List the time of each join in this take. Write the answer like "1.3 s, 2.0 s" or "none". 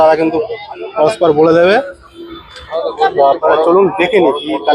none